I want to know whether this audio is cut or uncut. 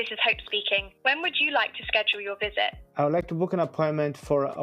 cut